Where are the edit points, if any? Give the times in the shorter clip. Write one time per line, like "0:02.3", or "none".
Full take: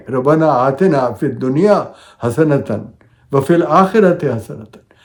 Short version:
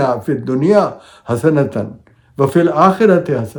none

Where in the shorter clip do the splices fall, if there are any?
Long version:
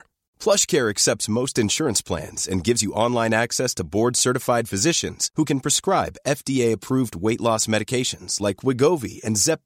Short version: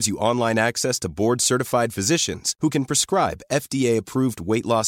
none

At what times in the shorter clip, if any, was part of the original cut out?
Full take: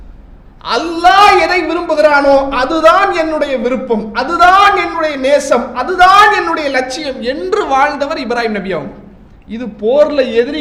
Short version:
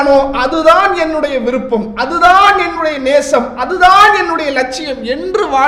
none

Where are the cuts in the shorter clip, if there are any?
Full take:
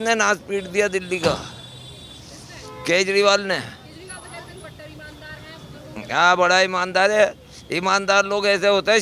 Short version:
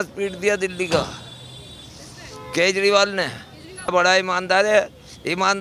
0:03.9

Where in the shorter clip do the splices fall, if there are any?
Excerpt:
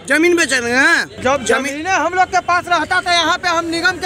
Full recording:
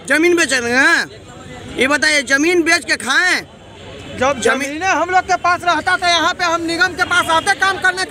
0:01.1

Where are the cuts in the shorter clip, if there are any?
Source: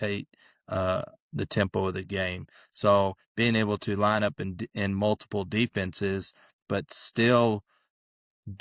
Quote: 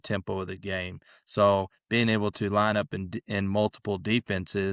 none

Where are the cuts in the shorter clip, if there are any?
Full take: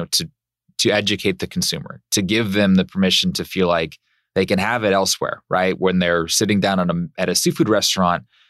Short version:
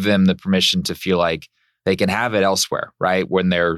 none

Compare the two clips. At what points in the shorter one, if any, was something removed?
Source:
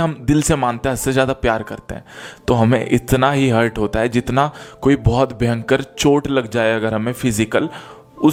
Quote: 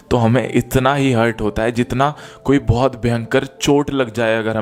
none

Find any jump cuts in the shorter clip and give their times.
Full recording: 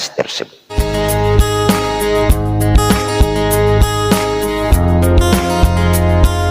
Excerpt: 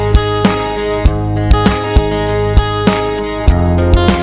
none

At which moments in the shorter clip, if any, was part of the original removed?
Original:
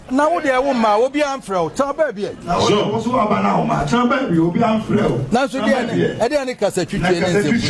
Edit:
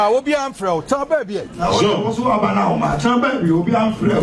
none

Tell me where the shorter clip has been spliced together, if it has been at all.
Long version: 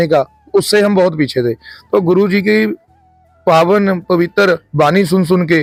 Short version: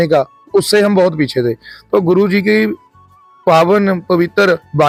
none

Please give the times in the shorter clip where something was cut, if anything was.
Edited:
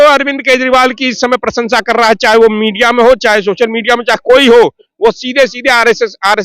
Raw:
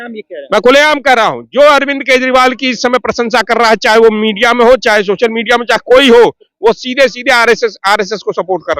none

